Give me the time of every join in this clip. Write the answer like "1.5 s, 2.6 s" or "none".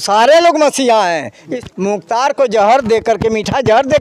1.3 s